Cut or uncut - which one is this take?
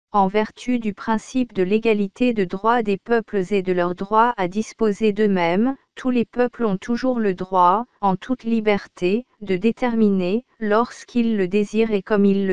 cut